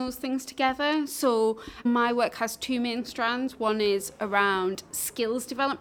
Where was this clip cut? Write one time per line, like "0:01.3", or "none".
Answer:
none